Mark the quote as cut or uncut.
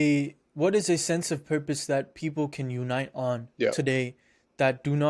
uncut